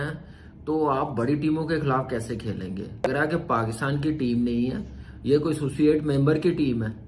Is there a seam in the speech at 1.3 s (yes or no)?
no